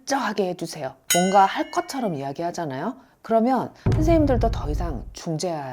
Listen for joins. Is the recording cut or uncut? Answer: cut